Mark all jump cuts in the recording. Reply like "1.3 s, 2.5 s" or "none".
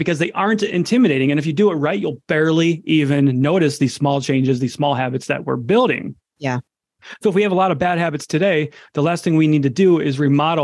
none